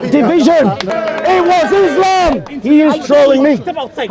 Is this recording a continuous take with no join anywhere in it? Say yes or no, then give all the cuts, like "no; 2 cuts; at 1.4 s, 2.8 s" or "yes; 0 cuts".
no; 2 cuts; at 0.9 s, 2.5 s